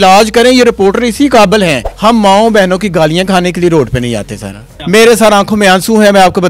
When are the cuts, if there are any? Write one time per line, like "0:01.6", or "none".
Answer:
0:01.9
0:04.7

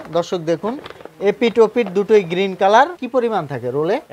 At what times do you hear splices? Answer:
0:03.0

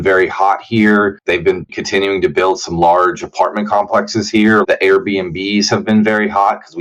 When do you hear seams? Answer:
0:01.5
0:04.6

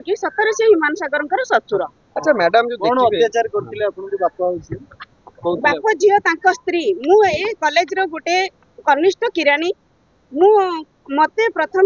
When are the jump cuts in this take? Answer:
none

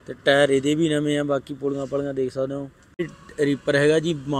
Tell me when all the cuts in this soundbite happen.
0:03.2

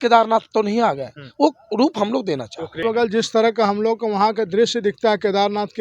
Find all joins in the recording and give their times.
0:02.8

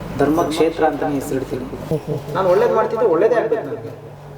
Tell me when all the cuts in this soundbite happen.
0:01.7

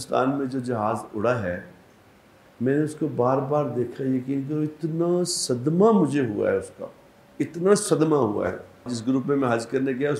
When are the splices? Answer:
0:09.0

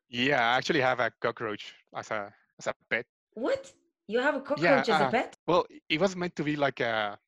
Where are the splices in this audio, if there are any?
0:03.2
0:05.3

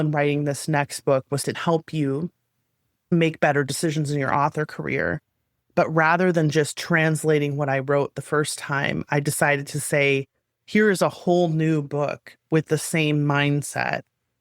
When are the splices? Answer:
0:01.6
0:03.1

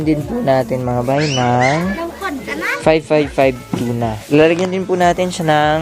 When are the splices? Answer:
0:04.2

